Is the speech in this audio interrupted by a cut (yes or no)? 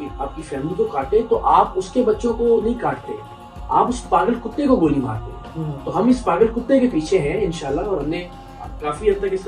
no